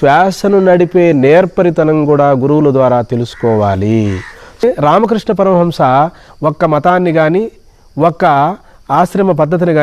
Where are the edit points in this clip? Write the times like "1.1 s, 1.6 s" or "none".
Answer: 4.6 s